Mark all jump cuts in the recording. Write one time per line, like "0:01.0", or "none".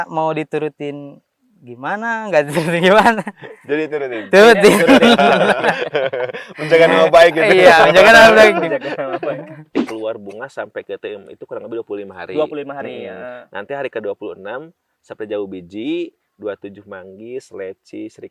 0:09.8